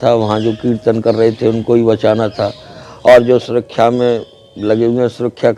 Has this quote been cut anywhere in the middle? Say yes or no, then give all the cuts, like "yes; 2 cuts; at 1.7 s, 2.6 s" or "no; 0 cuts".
no; 0 cuts